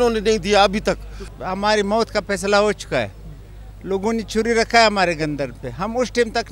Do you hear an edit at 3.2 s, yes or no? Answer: no